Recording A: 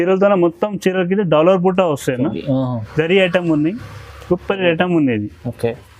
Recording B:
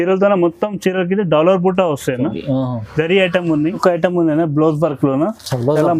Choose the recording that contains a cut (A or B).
B